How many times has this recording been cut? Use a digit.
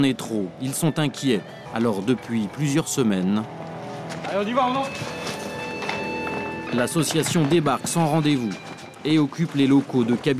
1